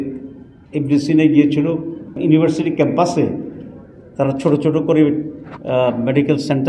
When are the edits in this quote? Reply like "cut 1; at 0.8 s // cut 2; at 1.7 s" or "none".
none